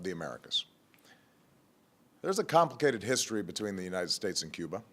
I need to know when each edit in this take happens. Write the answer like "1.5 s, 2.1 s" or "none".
1.3 s

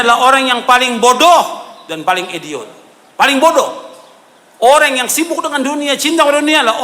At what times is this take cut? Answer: none

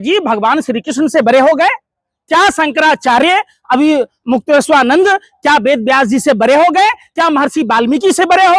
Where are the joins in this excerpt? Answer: none

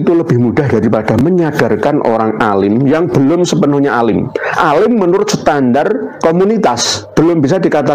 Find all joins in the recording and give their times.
6.1 s, 6.9 s

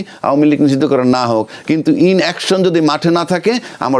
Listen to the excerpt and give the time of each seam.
none

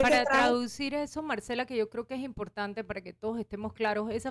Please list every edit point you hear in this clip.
none

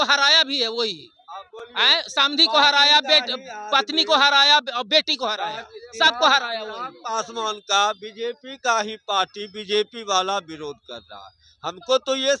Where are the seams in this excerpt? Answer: none

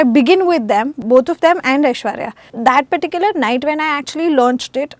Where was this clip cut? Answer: 1.0 s, 2.6 s

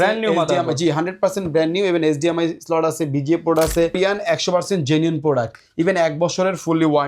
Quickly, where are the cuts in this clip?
4.0 s

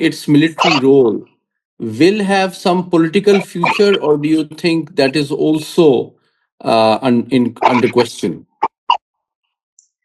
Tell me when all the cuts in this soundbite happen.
none

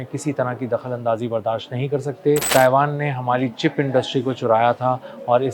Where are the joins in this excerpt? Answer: 2.5 s

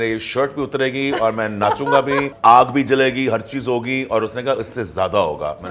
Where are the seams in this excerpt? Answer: 2.3 s

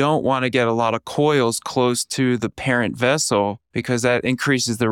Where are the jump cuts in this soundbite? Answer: 3.7 s

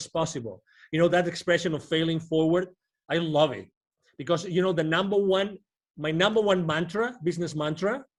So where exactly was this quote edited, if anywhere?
none

